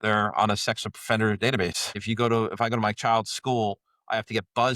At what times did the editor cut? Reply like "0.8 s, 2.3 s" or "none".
1.9 s